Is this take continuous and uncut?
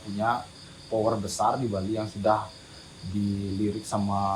yes; 0 cuts

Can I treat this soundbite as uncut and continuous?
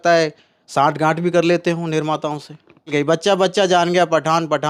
no; 1 cut; at 2.9 s

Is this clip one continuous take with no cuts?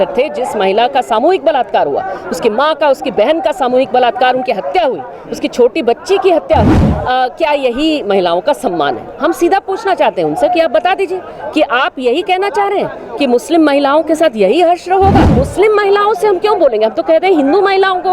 no; 2 cuts; at 6.8 s, 15.3 s

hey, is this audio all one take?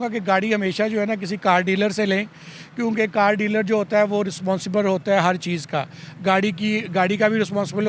yes; 0 cuts

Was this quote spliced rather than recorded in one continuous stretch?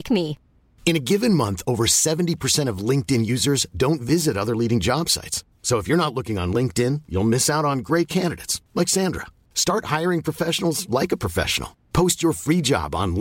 no; 0 cuts

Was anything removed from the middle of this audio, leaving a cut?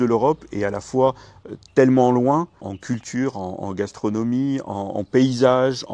no; 0 cuts

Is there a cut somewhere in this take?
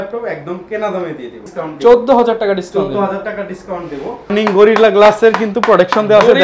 yes; 2 cuts; at 1.4 s, 4.3 s

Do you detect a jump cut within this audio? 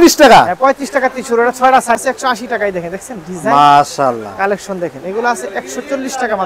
yes; 1 cut; at 2.0 s

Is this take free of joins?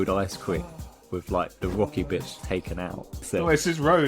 no; 1 cut; at 2.8 s

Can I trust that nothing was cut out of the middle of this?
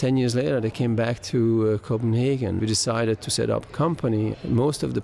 no; 1 cut; at 2.6 s

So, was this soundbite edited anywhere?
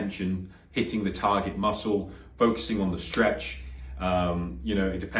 no; 0 cuts

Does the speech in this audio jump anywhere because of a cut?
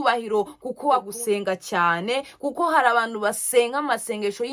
yes; 1 cut; at 1.1 s

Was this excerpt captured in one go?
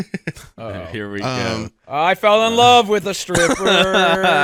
yes; 0 cuts

